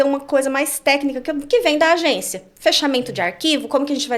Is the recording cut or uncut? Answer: uncut